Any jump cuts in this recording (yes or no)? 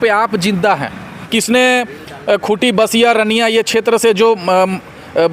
yes